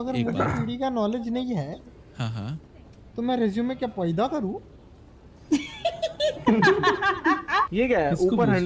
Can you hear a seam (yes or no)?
yes